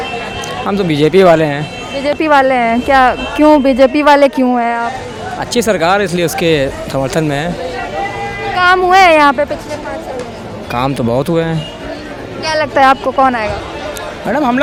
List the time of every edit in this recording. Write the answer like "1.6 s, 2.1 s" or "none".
none